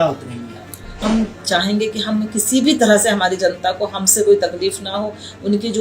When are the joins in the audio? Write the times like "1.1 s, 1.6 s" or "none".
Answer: 1.0 s